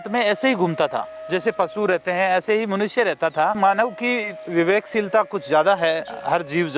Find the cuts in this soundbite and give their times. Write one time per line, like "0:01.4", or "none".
0:03.6